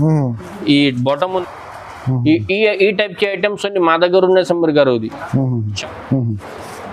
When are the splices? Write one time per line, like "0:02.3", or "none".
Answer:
0:01.4
0:05.8